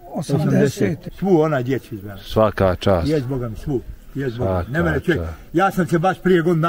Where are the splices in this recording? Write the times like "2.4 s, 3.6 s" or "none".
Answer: 1.1 s